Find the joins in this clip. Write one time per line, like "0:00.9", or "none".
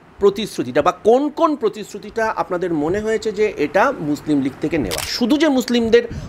0:05.1